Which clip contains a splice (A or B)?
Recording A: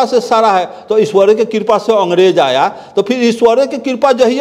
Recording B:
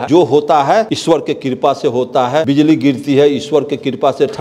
B